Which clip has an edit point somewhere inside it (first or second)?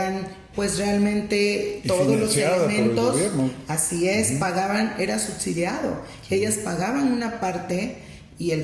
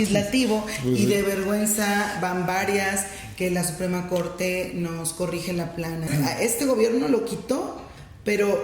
second